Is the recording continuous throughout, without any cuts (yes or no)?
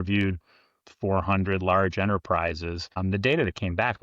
no